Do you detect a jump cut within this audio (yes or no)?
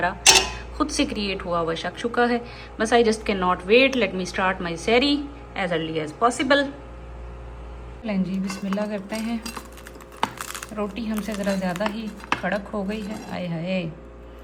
no